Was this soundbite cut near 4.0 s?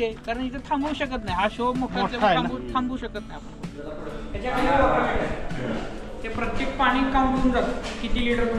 yes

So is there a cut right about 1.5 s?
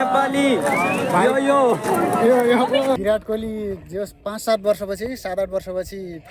no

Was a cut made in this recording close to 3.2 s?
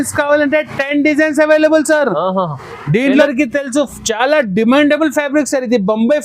yes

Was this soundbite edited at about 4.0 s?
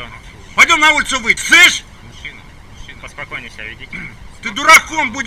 no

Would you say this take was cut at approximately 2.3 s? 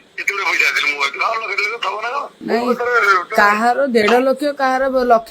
yes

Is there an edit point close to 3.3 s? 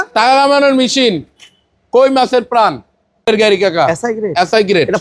yes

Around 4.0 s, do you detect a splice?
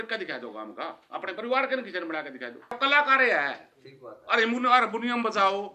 no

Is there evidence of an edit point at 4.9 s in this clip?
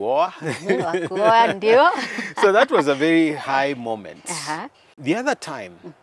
yes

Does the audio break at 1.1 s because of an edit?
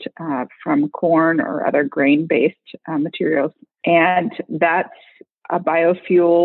no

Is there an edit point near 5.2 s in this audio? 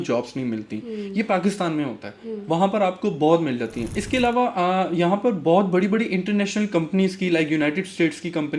no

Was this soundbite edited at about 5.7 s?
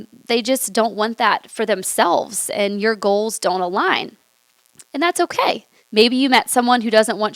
yes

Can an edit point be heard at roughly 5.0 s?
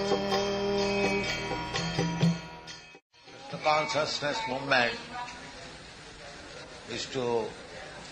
no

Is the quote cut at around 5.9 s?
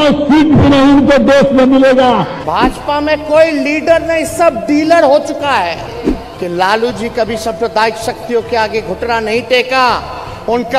yes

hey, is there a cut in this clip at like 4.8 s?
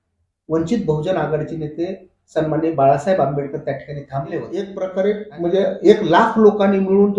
yes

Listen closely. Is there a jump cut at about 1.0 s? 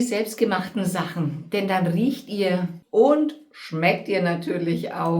no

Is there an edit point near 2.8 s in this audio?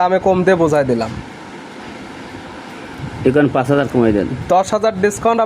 no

